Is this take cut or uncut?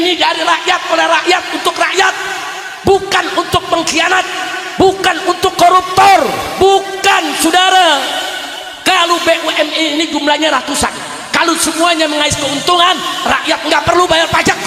uncut